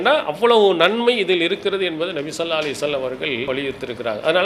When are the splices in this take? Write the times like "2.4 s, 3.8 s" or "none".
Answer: 3.5 s

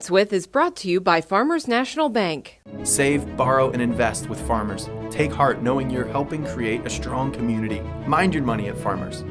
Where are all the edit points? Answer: none

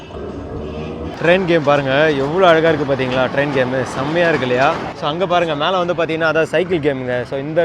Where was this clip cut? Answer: 1.1 s, 4.9 s

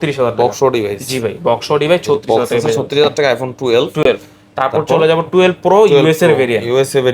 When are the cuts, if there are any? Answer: none

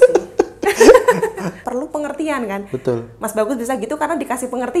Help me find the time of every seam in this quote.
1.6 s

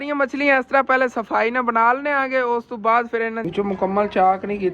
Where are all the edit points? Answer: 3.4 s

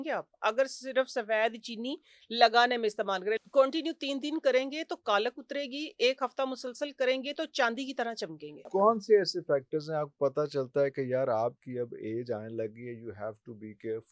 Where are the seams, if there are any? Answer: 3.4 s, 8.6 s

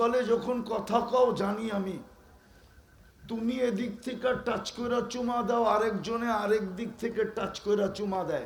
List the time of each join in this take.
none

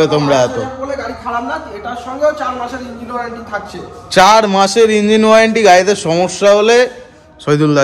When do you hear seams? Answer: none

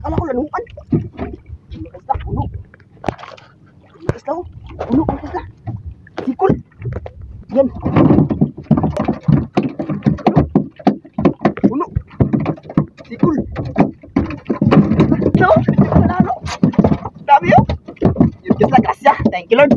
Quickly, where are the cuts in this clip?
9.0 s, 15.3 s

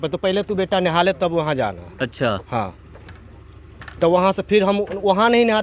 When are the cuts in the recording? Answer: none

